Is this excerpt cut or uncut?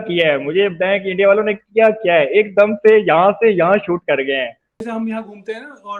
cut